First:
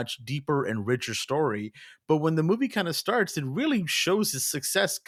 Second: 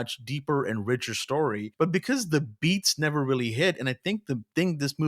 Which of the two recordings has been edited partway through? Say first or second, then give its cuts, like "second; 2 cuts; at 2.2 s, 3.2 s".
second; 1 cut; at 1.6 s